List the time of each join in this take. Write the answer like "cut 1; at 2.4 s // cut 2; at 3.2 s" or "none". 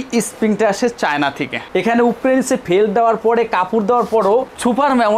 cut 1; at 1.5 s